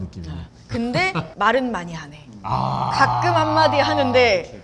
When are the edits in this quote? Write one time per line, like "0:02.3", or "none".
0:01.3

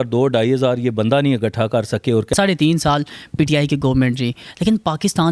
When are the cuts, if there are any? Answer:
0:02.3

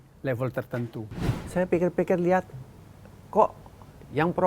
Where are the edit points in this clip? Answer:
0:01.2

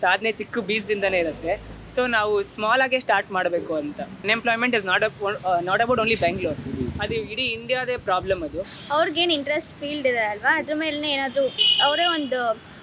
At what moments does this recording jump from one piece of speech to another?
0:04.2
0:08.7

